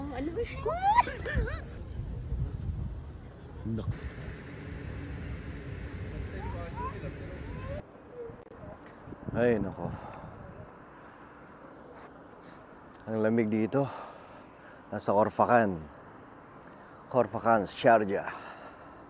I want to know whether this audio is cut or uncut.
cut